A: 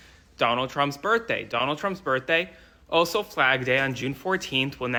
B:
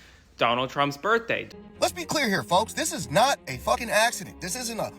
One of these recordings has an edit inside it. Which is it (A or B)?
B